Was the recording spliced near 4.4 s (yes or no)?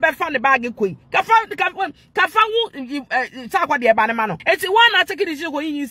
yes